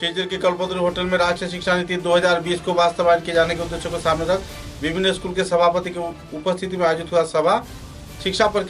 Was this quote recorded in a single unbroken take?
yes; 0 cuts

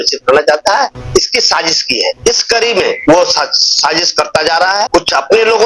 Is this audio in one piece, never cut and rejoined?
yes; 0 cuts

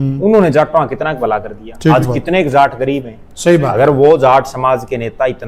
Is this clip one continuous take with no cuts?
yes; 0 cuts

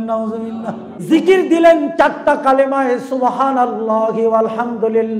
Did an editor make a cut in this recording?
yes; 1 cut; at 0.9 s

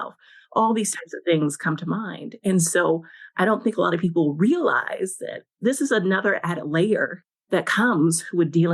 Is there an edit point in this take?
yes; 1 cut; at 7.1 s

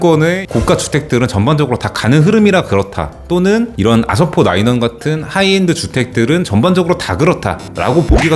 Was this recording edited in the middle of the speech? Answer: no; 0 cuts

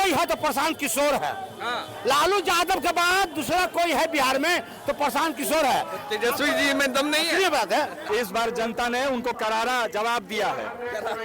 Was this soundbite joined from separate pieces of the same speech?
yes; 1 cut; at 8.0 s

